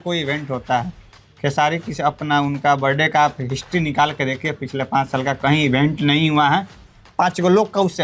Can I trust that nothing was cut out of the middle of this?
yes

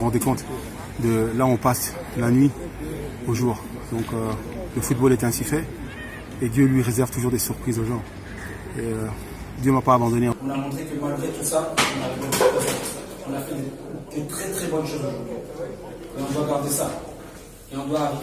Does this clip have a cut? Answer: yes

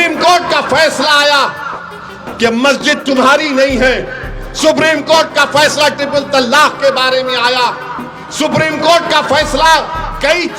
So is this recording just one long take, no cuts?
yes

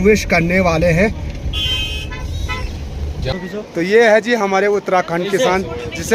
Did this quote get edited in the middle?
yes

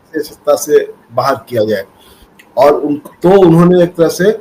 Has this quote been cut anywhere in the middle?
no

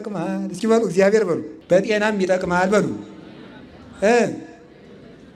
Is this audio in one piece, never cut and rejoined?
no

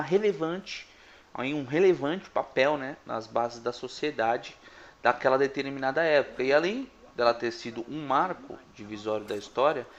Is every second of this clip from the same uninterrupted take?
yes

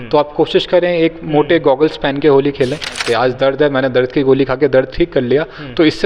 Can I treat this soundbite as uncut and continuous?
no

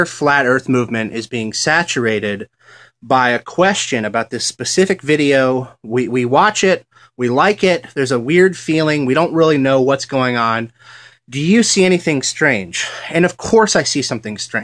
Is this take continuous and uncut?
yes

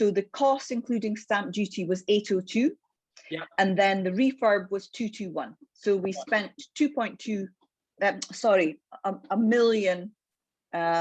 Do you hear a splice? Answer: no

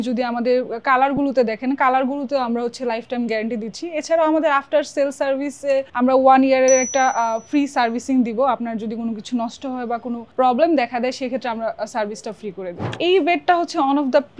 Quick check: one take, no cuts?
no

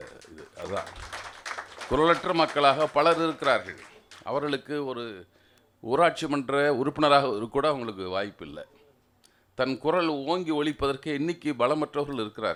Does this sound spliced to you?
no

